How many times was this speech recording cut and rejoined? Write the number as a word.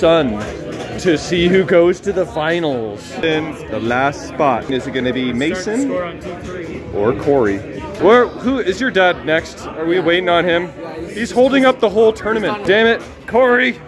three